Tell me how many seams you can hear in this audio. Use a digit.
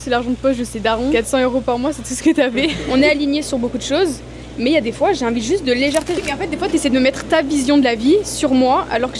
2